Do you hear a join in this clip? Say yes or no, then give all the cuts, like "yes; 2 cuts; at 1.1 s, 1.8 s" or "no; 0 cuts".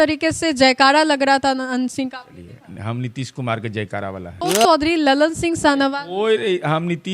yes; 1 cut; at 4.3 s